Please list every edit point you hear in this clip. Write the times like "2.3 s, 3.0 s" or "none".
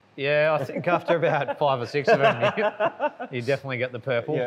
none

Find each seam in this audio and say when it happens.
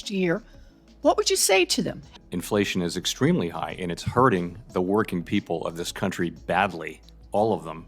2.1 s

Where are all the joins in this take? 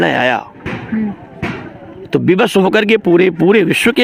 none

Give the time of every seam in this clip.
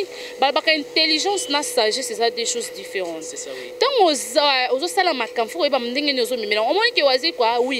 none

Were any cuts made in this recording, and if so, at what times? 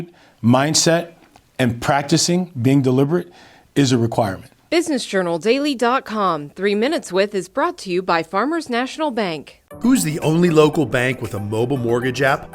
4.5 s

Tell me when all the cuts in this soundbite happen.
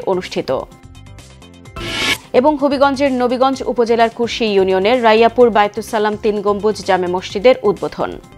none

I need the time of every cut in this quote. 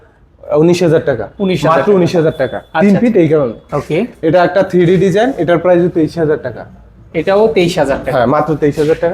none

